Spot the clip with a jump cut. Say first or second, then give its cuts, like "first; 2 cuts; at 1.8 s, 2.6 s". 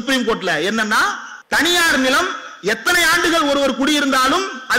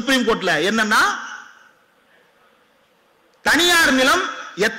first; 1 cut; at 1.3 s